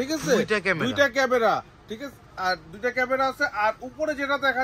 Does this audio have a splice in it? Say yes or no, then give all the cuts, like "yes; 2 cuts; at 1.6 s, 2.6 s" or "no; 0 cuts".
no; 0 cuts